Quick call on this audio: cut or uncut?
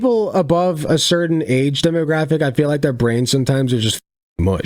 uncut